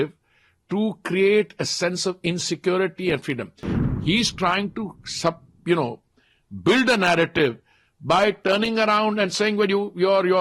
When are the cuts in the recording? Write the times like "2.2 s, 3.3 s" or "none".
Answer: 3.7 s